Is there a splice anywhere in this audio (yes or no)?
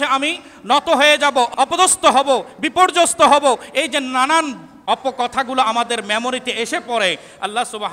yes